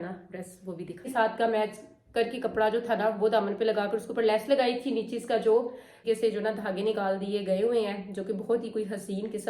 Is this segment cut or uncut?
cut